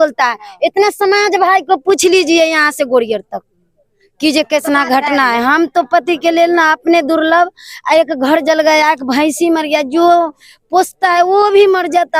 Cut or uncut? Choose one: uncut